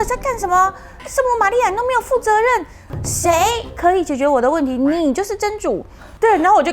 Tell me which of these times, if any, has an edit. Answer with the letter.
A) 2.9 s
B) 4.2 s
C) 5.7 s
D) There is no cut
A